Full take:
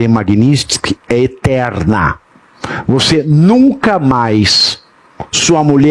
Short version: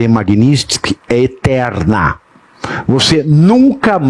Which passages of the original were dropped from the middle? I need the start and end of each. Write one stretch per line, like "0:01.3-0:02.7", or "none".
none

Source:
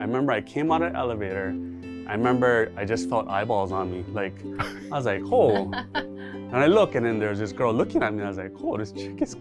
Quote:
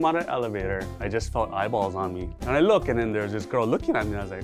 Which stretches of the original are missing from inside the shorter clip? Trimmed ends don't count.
0:01.6-0:02.8
0:04.0-0:06.3

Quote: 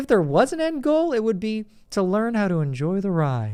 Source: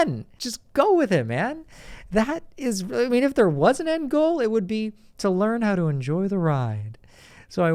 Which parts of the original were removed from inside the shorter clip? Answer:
none

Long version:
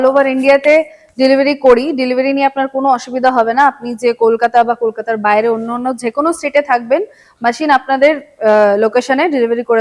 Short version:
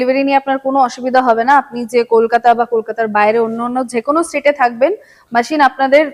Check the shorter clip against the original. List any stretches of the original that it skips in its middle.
none

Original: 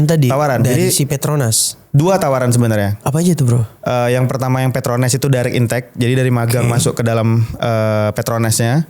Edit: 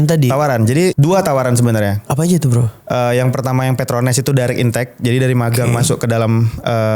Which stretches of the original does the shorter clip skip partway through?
0:00.9-0:01.9

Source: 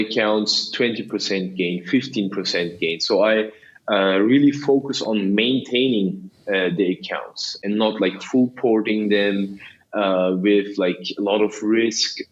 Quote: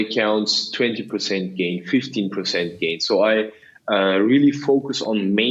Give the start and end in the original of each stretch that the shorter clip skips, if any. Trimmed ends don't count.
none

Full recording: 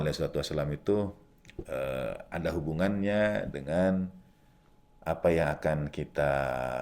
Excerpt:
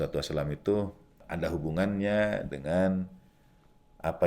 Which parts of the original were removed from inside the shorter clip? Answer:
0:01.4-0:02.2

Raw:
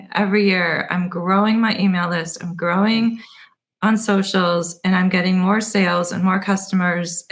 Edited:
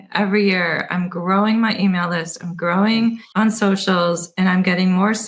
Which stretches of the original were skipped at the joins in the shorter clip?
0:03.2-0:03.7

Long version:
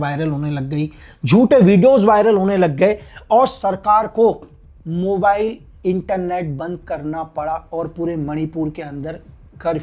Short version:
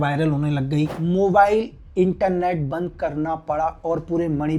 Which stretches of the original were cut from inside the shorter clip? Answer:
0:01.0-0:04.8

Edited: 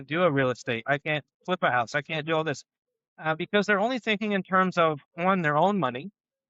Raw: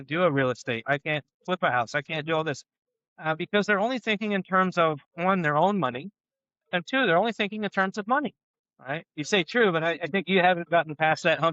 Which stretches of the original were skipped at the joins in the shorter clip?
none

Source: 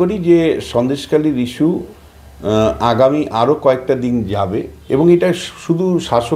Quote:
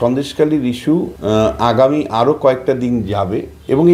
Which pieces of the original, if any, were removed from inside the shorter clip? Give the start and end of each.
0:01.9-0:02.3

